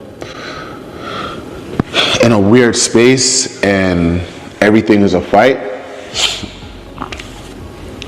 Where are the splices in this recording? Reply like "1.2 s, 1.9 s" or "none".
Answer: none